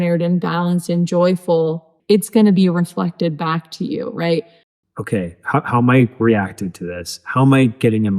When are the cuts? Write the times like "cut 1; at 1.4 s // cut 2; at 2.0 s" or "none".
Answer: cut 1; at 1.9 s // cut 2; at 4.6 s